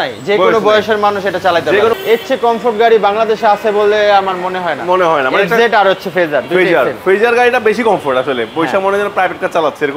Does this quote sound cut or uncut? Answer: cut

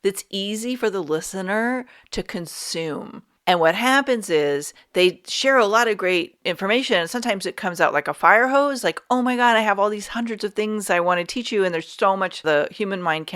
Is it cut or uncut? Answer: cut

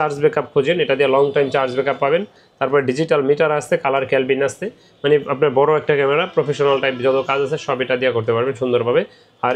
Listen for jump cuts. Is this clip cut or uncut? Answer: uncut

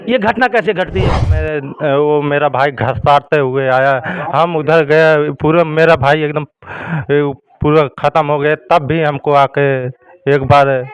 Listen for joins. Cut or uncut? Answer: cut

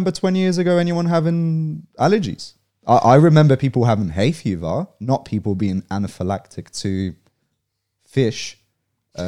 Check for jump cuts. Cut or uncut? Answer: uncut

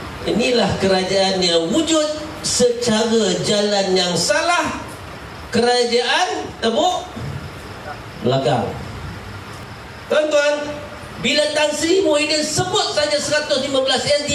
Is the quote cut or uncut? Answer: cut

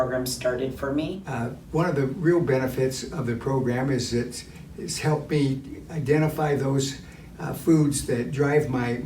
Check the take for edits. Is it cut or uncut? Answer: cut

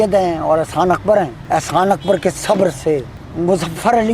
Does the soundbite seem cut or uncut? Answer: cut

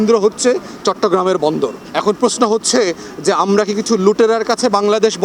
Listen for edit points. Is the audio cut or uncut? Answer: cut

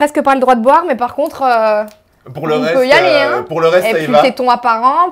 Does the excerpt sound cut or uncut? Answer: uncut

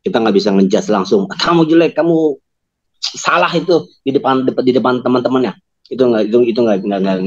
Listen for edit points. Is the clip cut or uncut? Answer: uncut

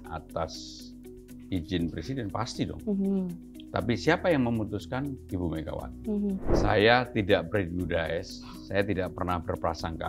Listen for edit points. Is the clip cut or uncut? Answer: cut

